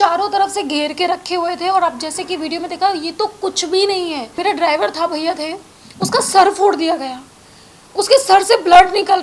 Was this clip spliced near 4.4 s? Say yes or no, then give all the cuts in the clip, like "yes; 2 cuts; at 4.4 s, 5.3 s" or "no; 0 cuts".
yes; 1 cut; at 4.4 s